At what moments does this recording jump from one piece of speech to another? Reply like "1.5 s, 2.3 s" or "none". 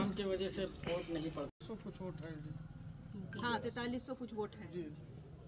1.5 s